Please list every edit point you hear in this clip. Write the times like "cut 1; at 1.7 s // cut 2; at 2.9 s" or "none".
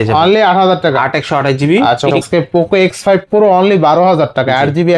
cut 1; at 2.2 s